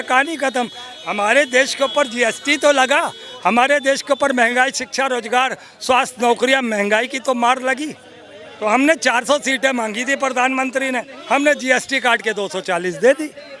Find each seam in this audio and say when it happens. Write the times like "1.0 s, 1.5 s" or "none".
none

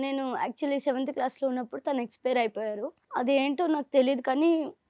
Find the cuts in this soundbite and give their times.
3.0 s

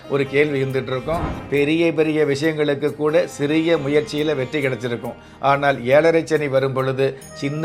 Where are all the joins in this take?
1.4 s

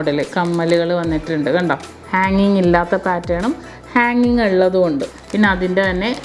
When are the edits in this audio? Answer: 2.0 s, 5.2 s

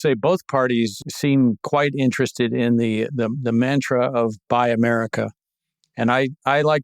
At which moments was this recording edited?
1.0 s, 1.6 s

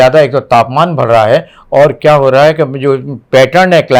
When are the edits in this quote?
none

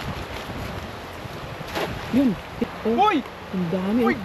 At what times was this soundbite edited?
2.6 s

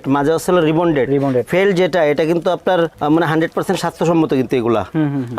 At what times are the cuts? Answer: none

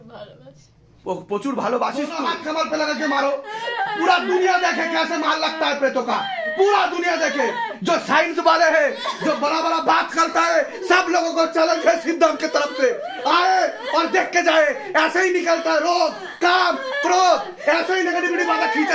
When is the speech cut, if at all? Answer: 2.2 s

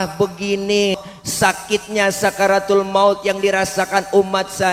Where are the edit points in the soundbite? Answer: 0.9 s

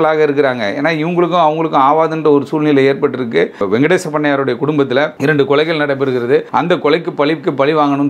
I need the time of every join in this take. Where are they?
3.6 s, 5.1 s, 6.5 s

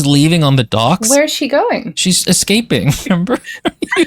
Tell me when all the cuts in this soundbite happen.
1.1 s, 2.1 s, 3.0 s

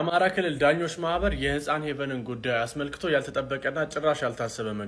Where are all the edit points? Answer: none

